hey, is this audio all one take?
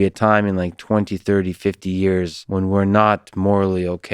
no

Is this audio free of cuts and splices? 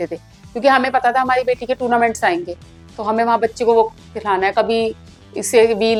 yes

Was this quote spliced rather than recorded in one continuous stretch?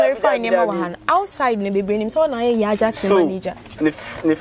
no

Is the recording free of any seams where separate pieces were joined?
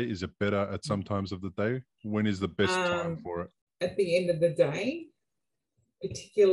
no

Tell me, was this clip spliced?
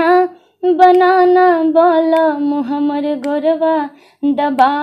no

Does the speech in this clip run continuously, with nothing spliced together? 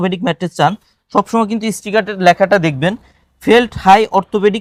yes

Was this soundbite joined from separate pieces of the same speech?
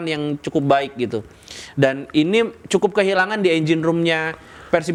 no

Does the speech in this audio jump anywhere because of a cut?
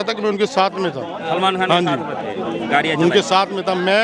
no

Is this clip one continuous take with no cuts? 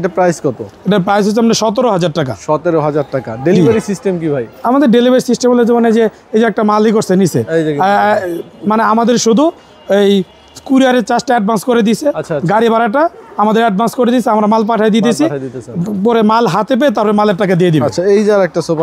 yes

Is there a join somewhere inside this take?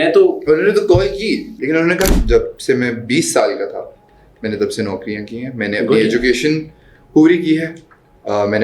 yes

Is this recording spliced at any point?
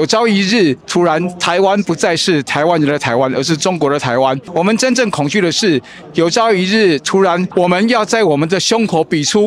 yes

